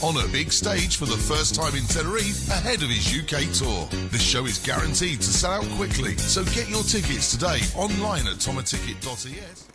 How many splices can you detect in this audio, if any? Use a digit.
0